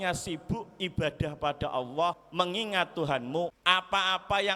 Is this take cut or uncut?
cut